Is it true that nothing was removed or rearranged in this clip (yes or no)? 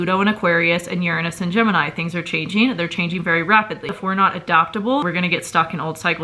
no